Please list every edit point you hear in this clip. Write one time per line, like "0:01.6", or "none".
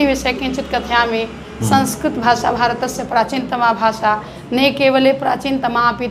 none

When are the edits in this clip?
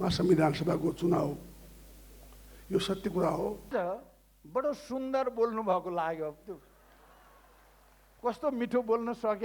0:03.7

